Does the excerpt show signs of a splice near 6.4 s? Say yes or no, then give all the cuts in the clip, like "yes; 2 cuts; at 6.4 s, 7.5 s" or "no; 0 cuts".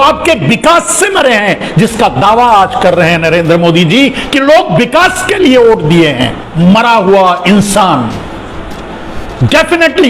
yes; 1 cut; at 6.4 s